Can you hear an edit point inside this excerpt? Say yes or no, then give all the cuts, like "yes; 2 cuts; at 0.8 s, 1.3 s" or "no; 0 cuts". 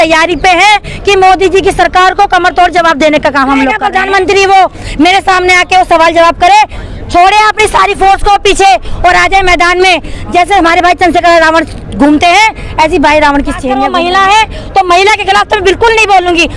yes; 2 cuts; at 3.8 s, 13.7 s